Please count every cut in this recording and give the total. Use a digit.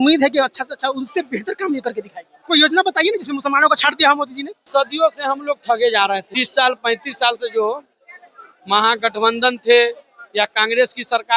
3